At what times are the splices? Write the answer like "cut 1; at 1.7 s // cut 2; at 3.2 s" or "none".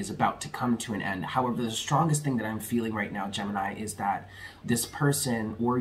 none

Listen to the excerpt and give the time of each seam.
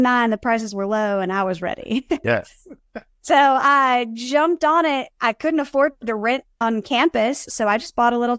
cut 1; at 2.2 s // cut 2; at 6.6 s

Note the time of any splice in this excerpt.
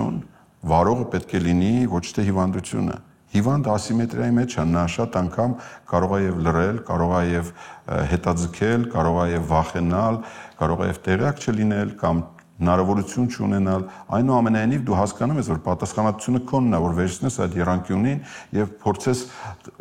none

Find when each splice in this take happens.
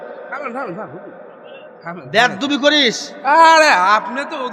cut 1; at 1.7 s

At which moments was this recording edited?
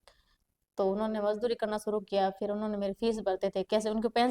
none

